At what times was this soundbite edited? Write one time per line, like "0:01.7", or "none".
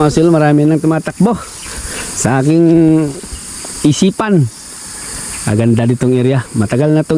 none